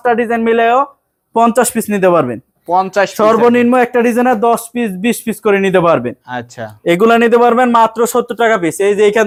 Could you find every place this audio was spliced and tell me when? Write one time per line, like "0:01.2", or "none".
none